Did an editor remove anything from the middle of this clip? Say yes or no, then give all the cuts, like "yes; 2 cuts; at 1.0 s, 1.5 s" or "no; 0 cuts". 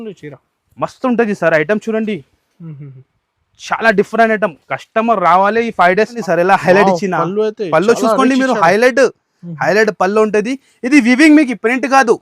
yes; 1 cut; at 6.2 s